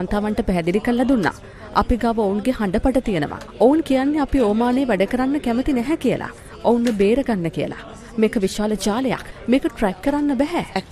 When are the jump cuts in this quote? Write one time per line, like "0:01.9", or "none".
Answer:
none